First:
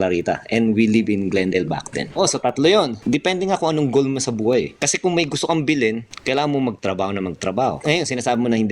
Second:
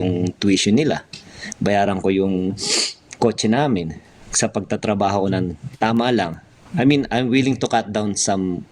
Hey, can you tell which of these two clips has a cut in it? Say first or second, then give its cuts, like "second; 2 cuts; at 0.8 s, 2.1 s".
first; 5 cuts; at 2.2 s, 3.0 s, 4.8 s, 6.1 s, 7.8 s